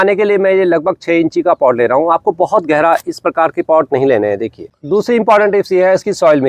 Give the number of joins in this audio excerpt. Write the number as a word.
one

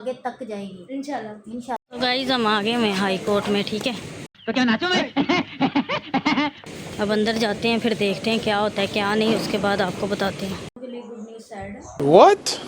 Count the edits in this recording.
two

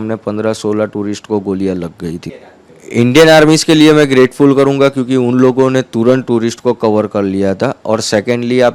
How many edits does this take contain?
one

